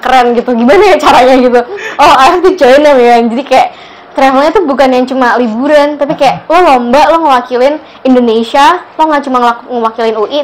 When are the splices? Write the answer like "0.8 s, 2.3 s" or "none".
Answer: none